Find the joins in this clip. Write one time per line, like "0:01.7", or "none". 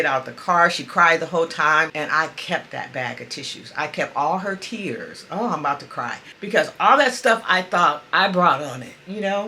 0:02.0
0:06.4